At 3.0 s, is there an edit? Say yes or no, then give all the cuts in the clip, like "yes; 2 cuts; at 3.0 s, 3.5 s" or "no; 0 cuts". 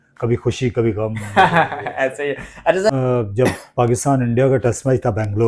yes; 1 cut; at 3.0 s